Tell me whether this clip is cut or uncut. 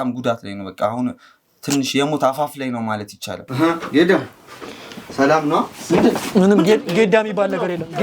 cut